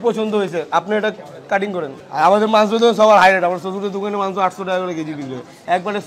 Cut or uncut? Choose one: uncut